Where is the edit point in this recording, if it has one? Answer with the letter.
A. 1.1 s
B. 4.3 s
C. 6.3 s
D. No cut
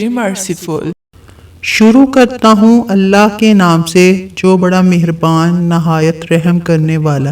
A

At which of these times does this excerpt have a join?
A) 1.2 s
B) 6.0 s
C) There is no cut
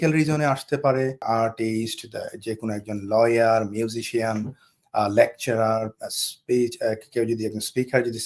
A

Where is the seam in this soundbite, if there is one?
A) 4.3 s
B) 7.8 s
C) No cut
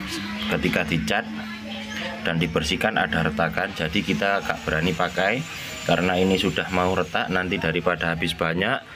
C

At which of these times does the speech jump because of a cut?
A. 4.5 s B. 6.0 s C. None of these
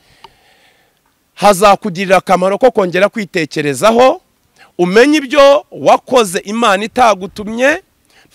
C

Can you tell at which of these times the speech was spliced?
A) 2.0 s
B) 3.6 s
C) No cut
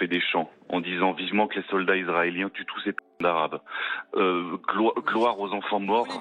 C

